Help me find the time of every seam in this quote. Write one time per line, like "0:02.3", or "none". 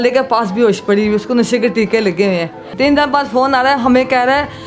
0:02.6